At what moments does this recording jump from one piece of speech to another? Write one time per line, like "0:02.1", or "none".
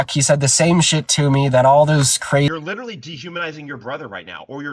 0:02.4